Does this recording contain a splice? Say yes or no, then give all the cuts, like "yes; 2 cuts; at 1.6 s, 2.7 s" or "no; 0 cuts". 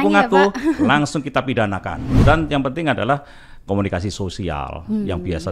yes; 1 cut; at 2.0 s